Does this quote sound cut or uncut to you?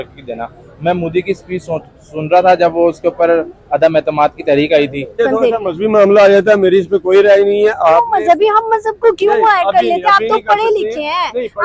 cut